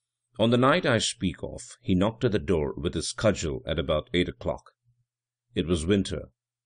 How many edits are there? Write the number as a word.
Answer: zero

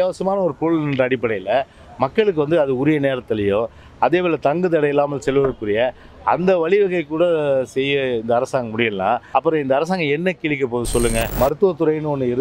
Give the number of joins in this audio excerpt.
two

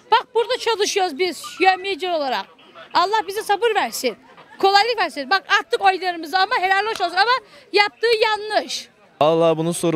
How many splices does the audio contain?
one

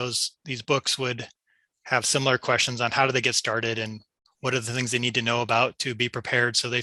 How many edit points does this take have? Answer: zero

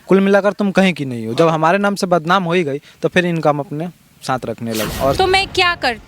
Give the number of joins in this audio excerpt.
one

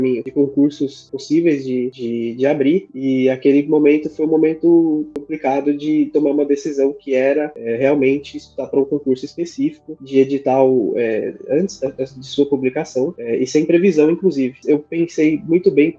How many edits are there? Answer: one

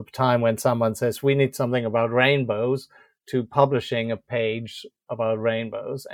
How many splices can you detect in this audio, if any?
zero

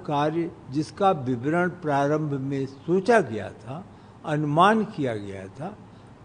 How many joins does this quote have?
zero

